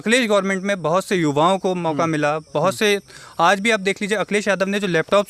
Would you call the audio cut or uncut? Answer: uncut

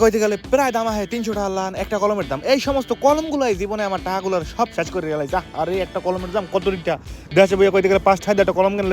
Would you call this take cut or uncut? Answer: uncut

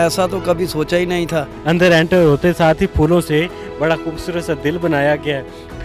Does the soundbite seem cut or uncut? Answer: cut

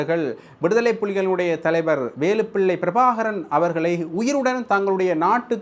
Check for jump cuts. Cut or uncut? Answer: uncut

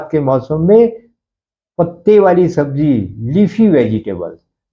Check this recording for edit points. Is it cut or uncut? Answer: uncut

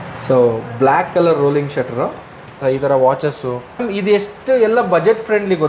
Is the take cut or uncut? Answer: cut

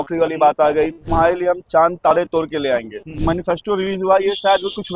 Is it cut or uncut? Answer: cut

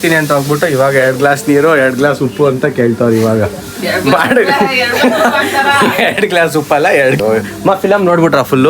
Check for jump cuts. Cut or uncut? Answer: cut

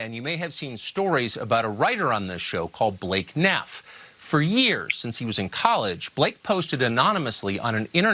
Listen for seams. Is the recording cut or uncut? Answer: uncut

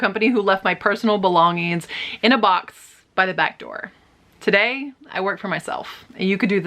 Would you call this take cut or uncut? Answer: uncut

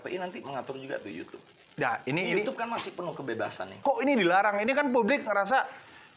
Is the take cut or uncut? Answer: cut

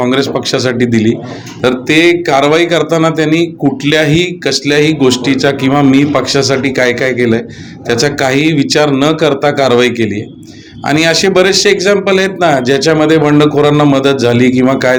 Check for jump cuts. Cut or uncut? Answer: uncut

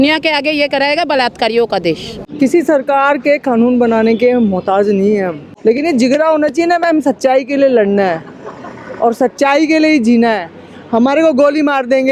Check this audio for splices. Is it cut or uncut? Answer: cut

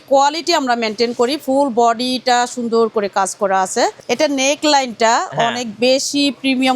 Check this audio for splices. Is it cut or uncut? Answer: cut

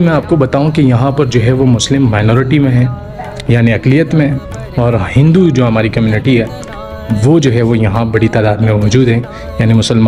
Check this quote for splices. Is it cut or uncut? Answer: uncut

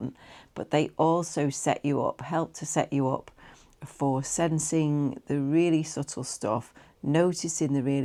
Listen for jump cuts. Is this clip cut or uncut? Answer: uncut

